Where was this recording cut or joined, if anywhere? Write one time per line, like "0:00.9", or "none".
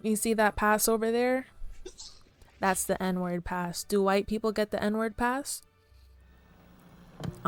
none